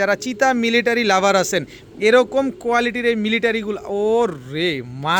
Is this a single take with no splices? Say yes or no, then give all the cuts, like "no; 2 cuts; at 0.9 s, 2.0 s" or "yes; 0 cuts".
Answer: yes; 0 cuts